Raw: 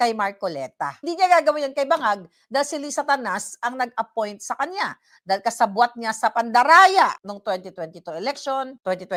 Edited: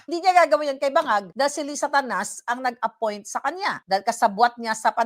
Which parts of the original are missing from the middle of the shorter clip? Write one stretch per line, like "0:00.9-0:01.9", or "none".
0:02.2-0:02.4
0:05.0-0:05.2